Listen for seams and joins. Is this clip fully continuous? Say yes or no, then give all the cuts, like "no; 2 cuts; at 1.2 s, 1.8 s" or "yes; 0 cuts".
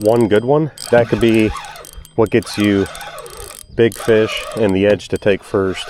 yes; 0 cuts